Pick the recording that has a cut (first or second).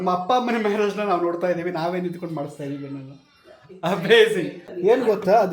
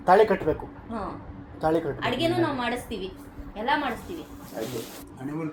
first